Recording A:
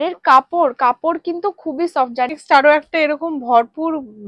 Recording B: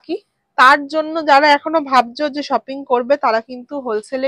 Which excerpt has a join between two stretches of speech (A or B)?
A